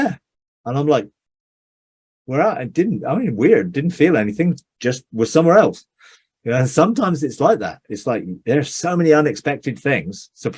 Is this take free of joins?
yes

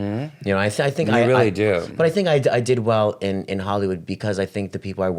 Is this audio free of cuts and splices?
yes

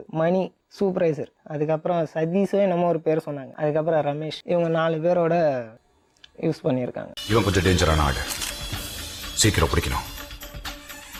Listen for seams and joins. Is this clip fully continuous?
yes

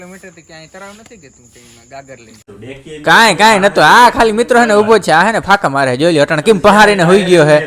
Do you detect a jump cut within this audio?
yes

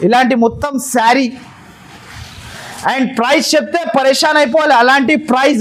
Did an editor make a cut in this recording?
no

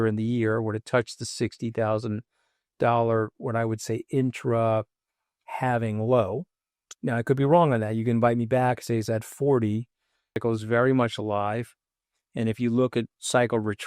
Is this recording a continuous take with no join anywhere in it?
no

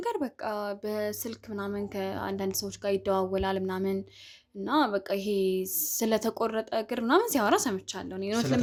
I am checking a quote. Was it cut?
no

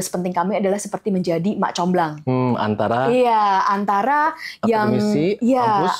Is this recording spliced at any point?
no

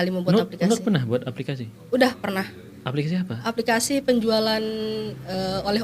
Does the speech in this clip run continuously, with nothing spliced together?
yes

